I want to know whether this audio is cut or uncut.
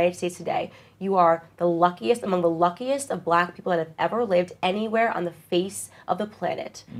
uncut